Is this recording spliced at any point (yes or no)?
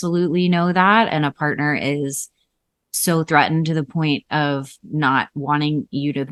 no